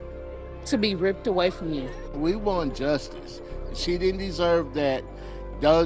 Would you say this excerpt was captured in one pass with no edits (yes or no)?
no